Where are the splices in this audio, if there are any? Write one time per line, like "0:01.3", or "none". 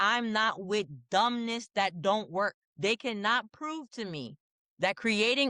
0:02.6